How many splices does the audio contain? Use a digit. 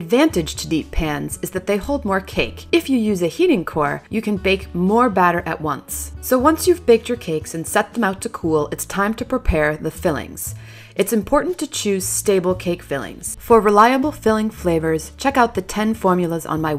1